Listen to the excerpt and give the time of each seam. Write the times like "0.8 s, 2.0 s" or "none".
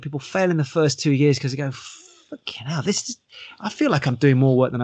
none